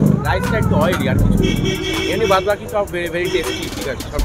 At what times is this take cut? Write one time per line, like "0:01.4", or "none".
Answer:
none